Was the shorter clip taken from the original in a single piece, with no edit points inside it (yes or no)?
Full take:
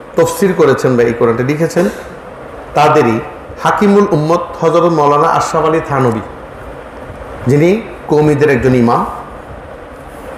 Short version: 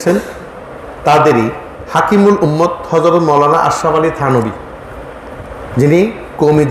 yes